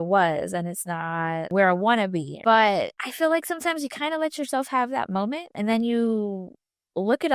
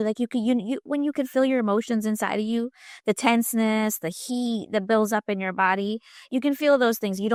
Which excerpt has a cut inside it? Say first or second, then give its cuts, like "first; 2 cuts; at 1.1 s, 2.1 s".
first; 3 cuts; at 1.5 s, 2.3 s, 3.0 s